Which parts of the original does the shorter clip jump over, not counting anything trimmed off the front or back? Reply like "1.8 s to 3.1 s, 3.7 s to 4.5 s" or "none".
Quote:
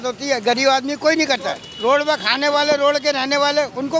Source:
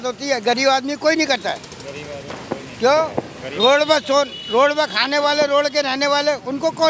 1.7 s to 4.4 s